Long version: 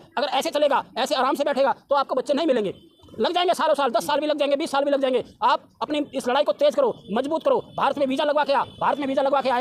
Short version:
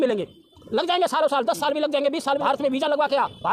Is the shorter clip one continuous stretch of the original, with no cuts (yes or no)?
no